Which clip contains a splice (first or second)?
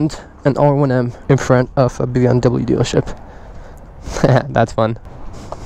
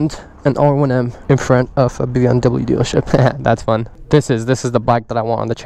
second